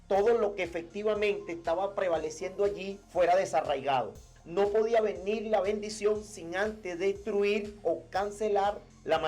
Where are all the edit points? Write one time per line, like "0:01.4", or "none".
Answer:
0:02.9